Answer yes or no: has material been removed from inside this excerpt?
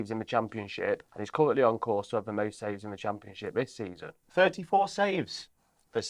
yes